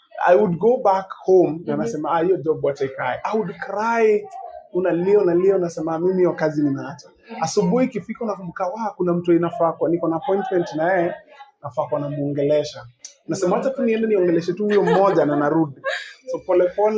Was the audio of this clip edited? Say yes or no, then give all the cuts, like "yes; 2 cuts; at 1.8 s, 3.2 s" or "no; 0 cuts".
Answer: no; 0 cuts